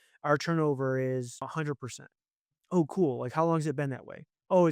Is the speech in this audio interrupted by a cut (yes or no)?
no